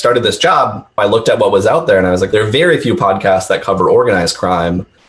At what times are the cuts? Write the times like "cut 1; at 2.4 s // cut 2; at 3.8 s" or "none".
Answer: cut 1; at 1.0 s // cut 2; at 2.3 s